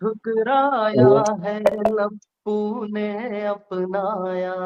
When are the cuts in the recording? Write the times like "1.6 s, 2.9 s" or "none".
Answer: none